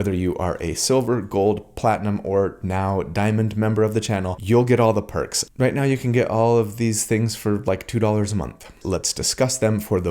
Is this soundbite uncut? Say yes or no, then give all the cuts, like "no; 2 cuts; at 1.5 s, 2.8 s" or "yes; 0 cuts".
no; 2 cuts; at 5.4 s, 8.7 s